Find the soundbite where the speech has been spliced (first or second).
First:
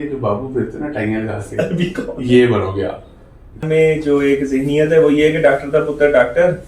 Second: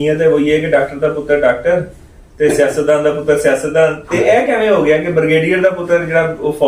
first